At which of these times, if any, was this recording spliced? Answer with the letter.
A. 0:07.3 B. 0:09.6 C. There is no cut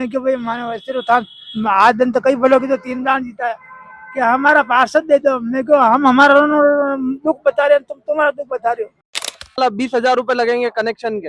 B